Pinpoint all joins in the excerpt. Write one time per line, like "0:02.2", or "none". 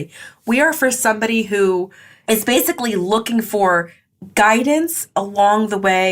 0:02.3